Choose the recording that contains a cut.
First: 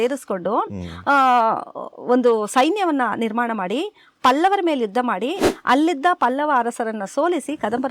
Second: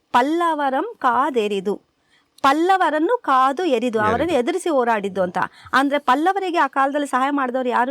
first; 1 cut; at 5.5 s

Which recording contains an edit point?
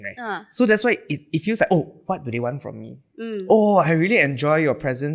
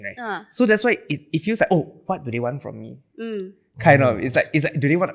first; 1 cut; at 3.3 s

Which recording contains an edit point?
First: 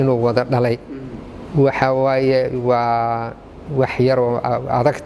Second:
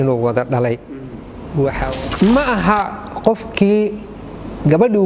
second; 1 cut; at 1.8 s

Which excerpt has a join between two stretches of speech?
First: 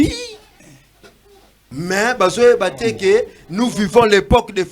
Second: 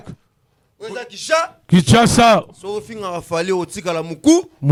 first; 1 cut; at 1.6 s

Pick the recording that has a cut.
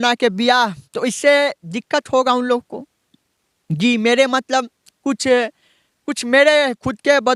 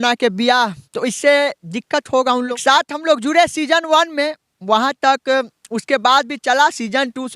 second; 1 cut; at 2.6 s

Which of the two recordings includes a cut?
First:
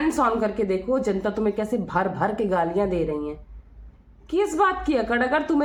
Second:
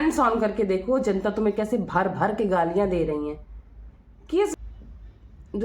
second; 1 cut; at 4.5 s

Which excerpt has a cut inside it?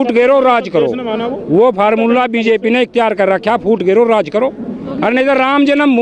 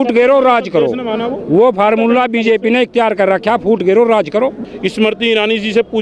second; 1 cut; at 4.7 s

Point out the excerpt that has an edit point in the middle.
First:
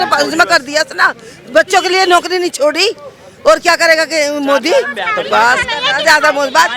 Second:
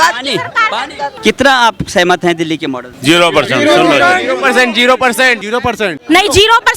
second; 3 cuts; at 1.1 s, 2.9 s, 6.0 s

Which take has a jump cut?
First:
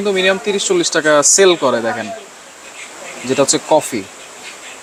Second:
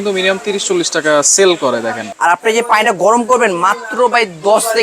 second; 1 cut; at 2.1 s

